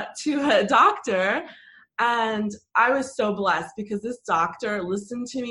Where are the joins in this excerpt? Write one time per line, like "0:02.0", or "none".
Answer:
none